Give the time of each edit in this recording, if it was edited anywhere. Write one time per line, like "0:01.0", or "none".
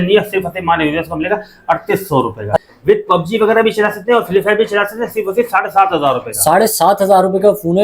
0:02.6